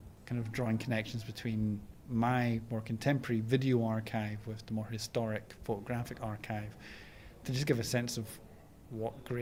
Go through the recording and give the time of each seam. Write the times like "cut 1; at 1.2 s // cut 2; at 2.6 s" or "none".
none